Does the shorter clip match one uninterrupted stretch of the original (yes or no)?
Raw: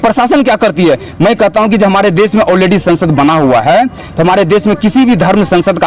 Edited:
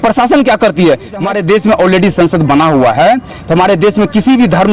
no